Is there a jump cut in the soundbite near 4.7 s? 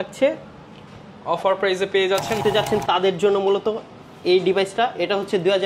no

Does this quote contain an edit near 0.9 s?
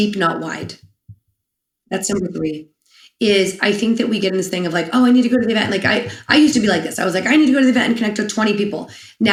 no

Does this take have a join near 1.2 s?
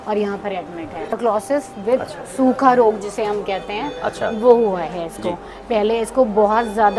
yes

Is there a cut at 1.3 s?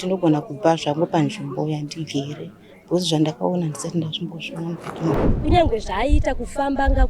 no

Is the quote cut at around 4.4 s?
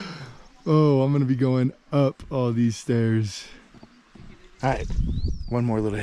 yes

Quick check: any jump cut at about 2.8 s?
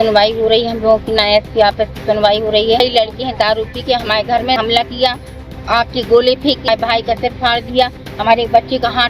yes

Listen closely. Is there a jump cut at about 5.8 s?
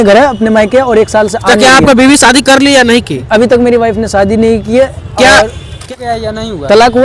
yes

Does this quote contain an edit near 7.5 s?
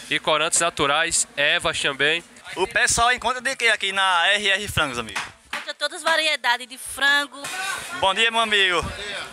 yes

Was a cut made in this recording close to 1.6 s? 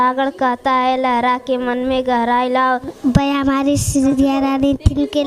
no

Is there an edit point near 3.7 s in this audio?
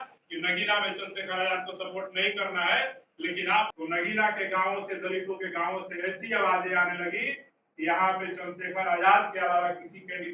yes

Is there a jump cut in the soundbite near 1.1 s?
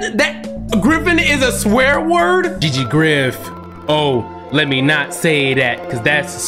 no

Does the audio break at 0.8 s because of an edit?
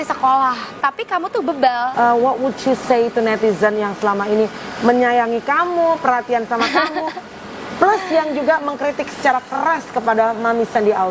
yes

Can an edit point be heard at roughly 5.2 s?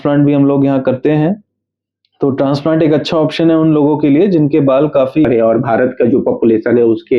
yes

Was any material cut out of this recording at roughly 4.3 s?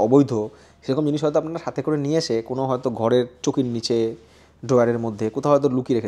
yes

